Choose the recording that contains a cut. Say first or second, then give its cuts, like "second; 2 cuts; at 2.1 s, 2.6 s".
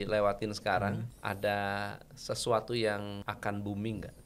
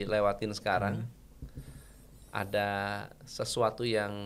first; 2 cuts; at 1.1 s, 3.2 s